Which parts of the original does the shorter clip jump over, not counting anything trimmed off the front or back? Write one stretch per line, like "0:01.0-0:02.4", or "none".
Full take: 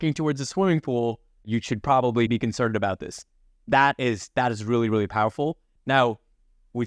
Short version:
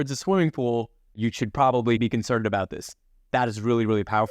0:03.5-0:04.2